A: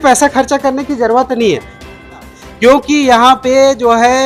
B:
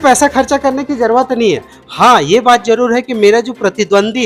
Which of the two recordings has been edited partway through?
A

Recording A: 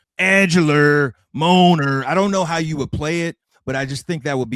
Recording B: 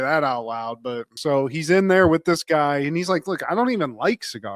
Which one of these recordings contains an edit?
B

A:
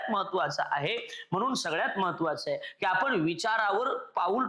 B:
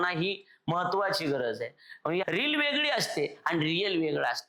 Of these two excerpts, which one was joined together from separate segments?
B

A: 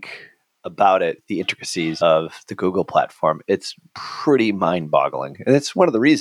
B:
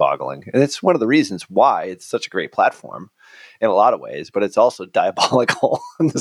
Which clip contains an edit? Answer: A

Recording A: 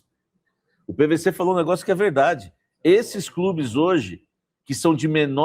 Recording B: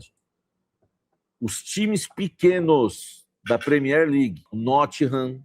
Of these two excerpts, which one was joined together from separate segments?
B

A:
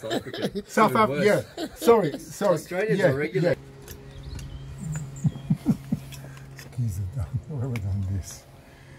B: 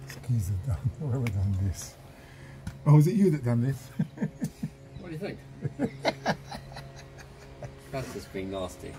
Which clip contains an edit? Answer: A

